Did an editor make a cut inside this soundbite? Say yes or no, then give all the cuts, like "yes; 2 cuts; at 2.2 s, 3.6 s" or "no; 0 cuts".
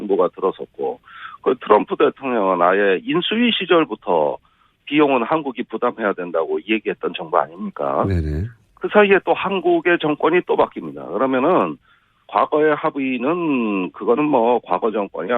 yes; 1 cut; at 3.7 s